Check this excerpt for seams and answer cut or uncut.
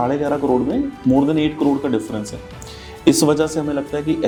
uncut